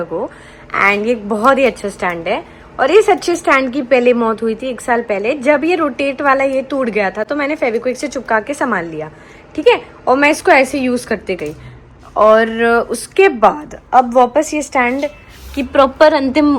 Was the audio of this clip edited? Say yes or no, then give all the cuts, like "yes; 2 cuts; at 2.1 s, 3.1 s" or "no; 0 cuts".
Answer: no; 0 cuts